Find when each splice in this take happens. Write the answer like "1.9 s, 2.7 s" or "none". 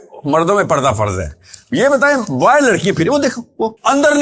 none